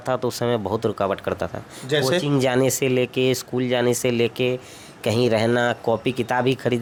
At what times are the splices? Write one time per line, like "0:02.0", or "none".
none